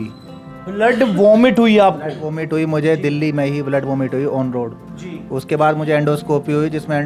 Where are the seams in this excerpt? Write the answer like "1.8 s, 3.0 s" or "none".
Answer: none

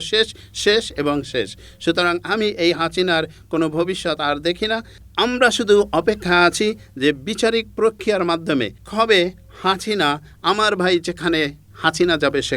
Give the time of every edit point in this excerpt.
5.0 s, 8.8 s

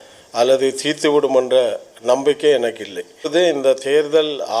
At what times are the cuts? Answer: 3.3 s

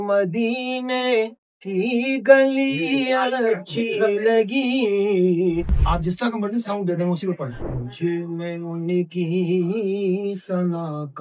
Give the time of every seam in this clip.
5.8 s, 7.6 s

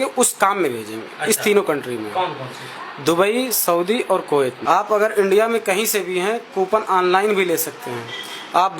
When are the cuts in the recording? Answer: 4.6 s

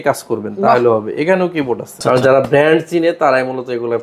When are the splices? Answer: 2.0 s

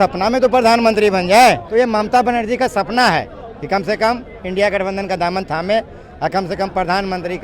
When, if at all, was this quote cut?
1.6 s

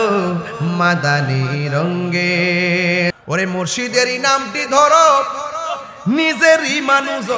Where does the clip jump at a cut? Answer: 3.1 s

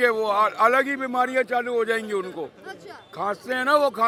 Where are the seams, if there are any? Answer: none

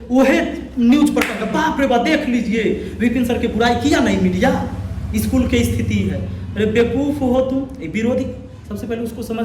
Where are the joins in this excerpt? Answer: none

